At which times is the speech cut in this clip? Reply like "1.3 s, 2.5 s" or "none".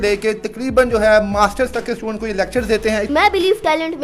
3.1 s

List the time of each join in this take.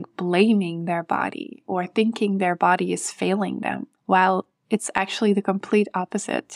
3.9 s

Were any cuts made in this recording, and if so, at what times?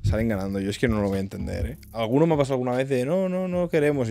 none

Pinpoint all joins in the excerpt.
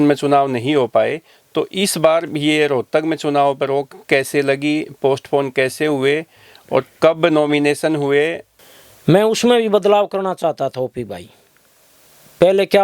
8.5 s

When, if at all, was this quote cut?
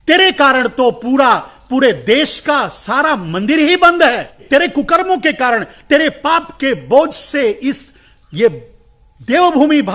4.4 s

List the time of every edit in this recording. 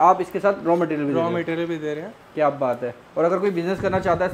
none

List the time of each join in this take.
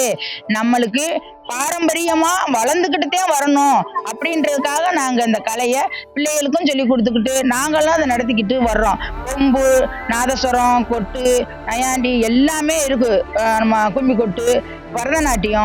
none

